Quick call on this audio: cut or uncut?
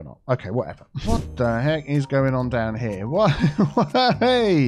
cut